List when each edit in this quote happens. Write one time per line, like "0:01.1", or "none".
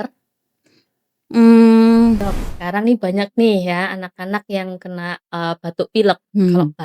0:02.4